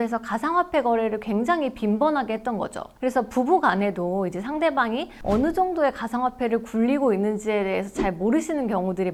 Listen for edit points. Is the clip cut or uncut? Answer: uncut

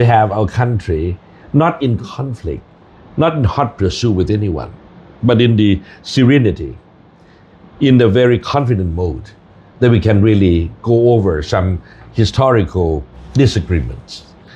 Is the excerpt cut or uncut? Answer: cut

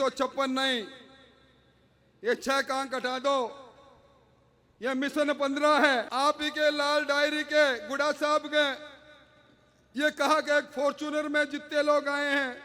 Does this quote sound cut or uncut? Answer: cut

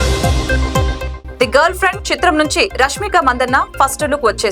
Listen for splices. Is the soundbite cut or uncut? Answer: cut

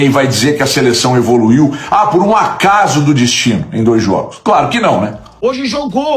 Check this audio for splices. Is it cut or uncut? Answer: cut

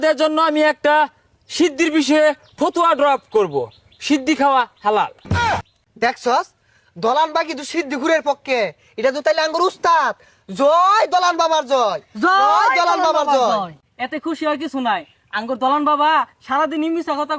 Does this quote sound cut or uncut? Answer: uncut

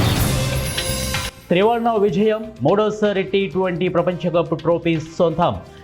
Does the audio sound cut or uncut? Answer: cut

